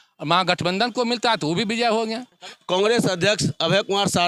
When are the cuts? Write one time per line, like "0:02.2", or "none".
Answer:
0:02.5